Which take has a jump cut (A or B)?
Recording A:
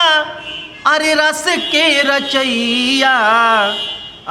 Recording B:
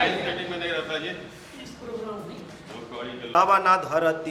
B